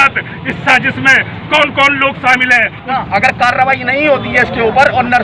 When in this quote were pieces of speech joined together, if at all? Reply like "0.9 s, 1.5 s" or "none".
2.9 s